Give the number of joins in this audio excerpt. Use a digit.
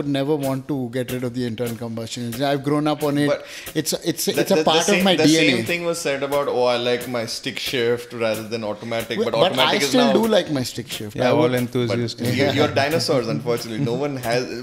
0